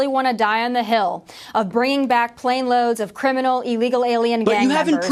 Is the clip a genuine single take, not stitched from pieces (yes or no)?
yes